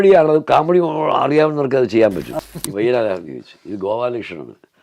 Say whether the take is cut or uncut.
cut